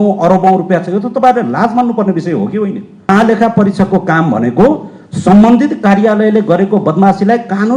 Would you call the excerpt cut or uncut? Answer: cut